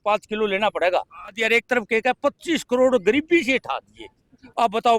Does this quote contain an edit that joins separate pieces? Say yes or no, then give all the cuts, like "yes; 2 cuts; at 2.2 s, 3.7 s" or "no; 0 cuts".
yes; 1 cut; at 1.4 s